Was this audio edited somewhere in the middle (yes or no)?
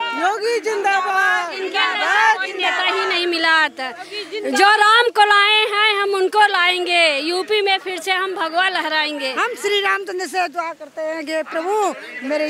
no